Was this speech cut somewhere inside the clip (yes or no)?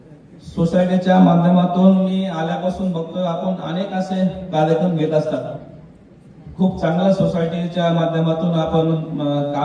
no